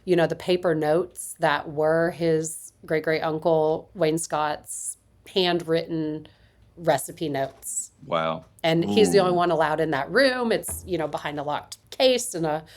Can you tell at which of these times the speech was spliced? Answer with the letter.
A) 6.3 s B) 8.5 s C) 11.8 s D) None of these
C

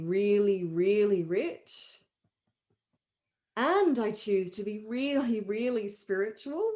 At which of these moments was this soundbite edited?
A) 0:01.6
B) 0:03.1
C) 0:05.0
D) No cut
B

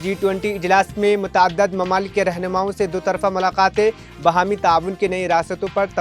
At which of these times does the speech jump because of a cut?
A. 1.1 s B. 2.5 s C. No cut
C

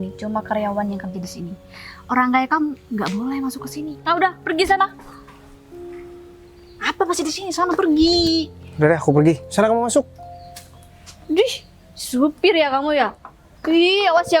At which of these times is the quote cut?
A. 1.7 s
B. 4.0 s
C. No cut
B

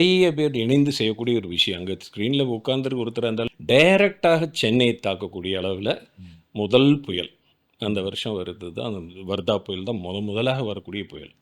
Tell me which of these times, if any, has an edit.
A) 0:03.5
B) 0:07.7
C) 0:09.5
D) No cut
A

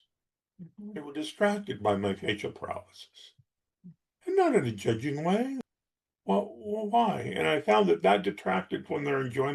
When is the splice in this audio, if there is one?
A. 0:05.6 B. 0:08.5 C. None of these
A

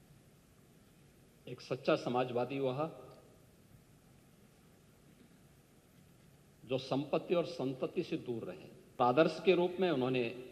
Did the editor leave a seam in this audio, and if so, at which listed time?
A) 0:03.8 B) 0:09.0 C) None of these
B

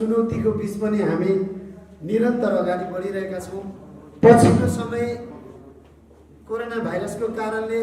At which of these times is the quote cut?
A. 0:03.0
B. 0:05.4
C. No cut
C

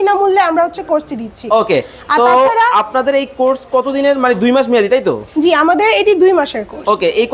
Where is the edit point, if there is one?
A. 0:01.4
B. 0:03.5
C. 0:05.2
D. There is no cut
D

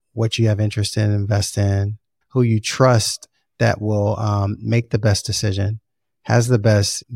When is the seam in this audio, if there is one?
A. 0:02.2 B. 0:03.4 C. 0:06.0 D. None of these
A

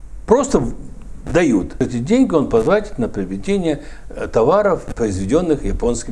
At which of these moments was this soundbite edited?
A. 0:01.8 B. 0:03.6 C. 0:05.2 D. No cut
A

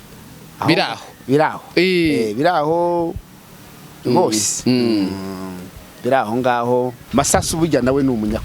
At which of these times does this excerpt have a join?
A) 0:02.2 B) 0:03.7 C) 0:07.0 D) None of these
C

